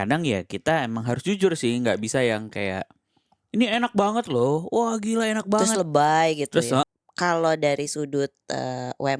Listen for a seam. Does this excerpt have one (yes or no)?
yes